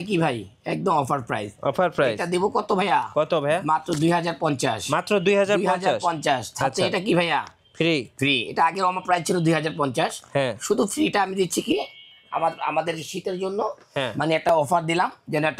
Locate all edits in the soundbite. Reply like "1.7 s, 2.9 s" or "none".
none